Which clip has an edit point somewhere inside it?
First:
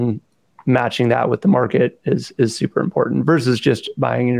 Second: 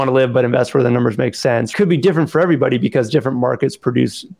second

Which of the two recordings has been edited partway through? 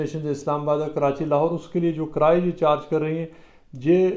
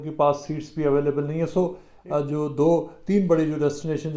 second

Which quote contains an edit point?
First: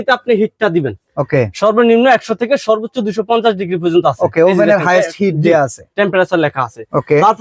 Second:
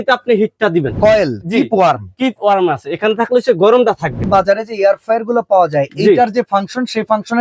second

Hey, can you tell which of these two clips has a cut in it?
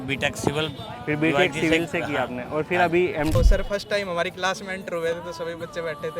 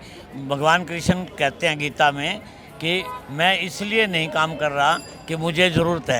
first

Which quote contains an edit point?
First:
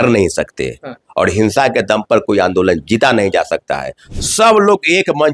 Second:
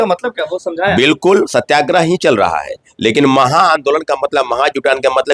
first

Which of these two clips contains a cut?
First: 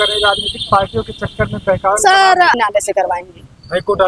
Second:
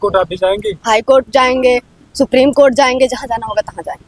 first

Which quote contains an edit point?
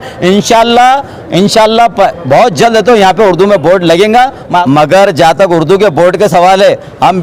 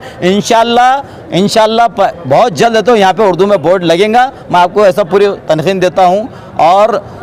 first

